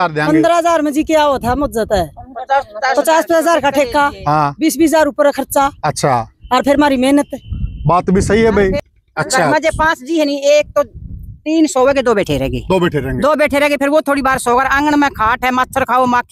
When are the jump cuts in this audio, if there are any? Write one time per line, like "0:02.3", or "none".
0:08.8